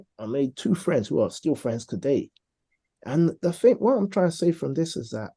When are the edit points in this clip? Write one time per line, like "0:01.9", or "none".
none